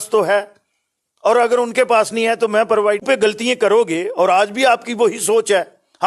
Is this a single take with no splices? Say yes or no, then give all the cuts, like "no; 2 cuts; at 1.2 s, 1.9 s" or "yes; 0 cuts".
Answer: no; 1 cut; at 3.0 s